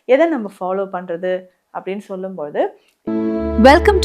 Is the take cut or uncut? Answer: cut